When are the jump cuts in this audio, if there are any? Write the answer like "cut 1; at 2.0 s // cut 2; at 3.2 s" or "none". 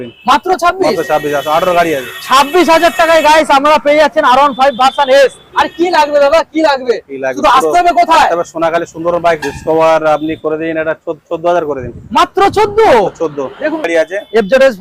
cut 1; at 9.5 s // cut 2; at 13.9 s